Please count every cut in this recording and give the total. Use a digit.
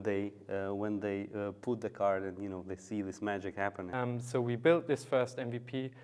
1